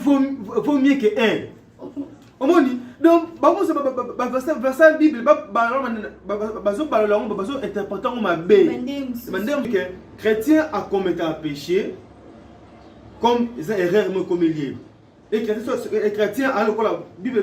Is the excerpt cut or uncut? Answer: cut